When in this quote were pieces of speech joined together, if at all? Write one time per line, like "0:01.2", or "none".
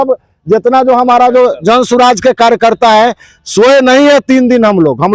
none